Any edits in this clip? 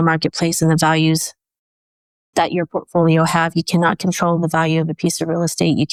no; 0 cuts

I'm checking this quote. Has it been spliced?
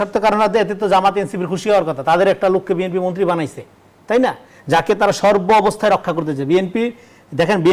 no; 0 cuts

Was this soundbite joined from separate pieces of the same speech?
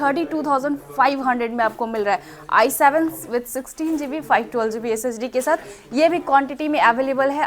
no; 0 cuts

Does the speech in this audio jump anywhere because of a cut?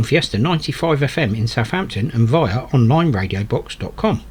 no; 0 cuts

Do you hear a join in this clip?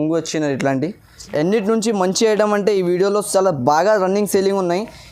yes; 1 cut; at 1.2 s

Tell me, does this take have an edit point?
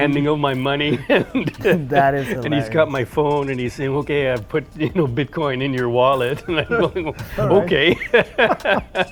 no; 0 cuts

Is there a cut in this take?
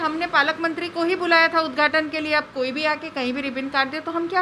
no; 0 cuts

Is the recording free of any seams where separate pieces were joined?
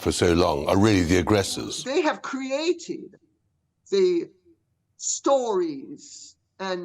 no; 1 cut; at 1.9 s

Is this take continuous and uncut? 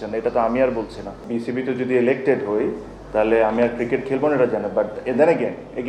no; 1 cut; at 1.2 s

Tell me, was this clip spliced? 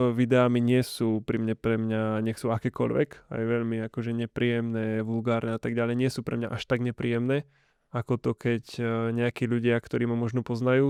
no; 0 cuts

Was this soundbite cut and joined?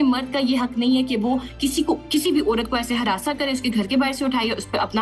no; 0 cuts

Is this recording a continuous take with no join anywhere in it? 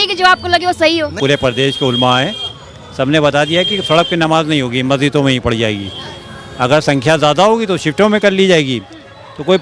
no; 1 cut; at 1.1 s

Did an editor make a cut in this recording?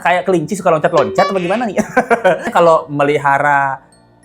yes; 1 cut; at 2.5 s

